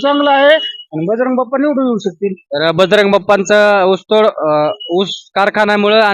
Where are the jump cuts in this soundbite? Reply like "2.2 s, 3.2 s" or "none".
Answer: none